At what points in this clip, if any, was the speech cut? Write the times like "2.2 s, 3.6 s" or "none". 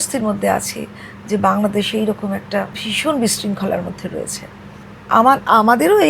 none

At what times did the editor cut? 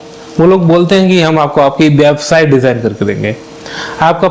none

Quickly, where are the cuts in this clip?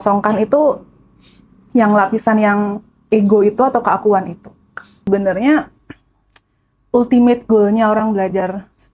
5.1 s

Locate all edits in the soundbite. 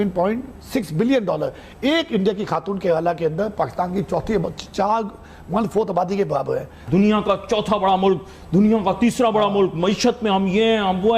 6.8 s

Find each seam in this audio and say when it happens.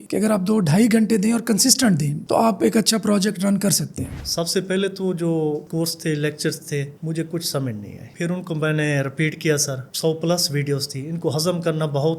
2.1 s, 4.0 s, 9.9 s

